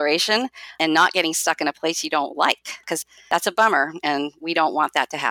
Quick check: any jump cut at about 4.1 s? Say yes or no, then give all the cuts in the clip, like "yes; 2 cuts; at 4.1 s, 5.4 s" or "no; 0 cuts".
no; 2 cuts; at 0.8 s, 2.8 s